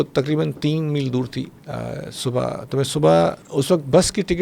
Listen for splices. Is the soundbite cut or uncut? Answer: cut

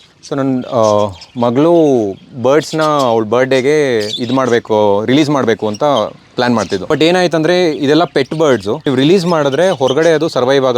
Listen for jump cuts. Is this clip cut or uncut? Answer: cut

